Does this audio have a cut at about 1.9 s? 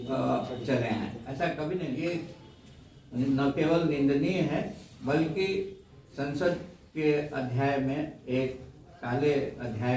yes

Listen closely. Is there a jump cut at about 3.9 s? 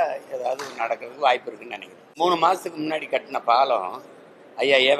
no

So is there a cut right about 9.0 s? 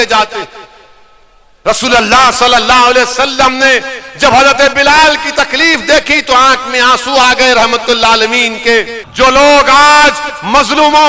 yes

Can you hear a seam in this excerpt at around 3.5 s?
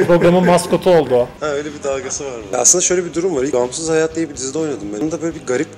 yes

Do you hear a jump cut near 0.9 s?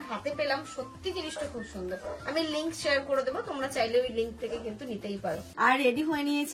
no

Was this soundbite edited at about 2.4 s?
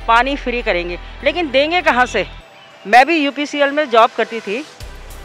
no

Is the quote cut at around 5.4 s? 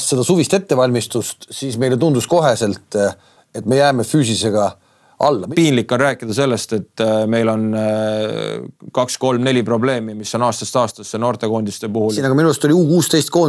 yes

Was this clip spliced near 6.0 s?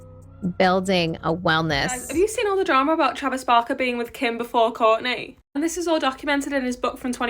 no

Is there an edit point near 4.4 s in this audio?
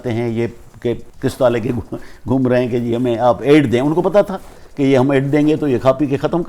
no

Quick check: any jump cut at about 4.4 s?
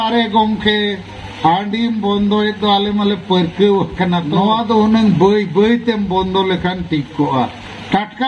yes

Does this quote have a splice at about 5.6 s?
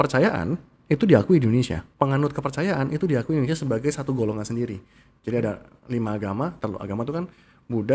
no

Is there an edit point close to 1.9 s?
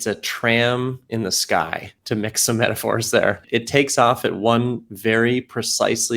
yes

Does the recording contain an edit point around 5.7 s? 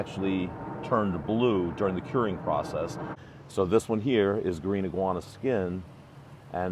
no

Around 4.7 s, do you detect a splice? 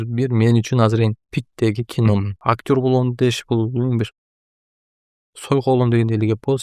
no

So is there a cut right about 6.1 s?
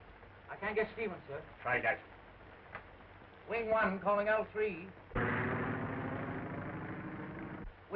yes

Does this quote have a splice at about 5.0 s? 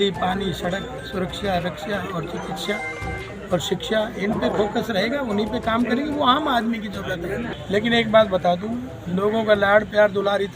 no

